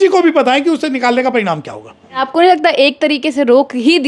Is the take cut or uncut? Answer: cut